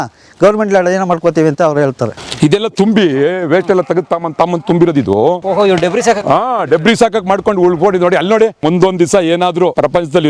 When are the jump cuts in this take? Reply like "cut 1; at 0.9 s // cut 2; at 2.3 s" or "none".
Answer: cut 1; at 2.2 s // cut 2; at 8.6 s